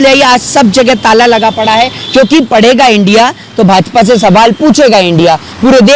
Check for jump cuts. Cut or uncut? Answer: uncut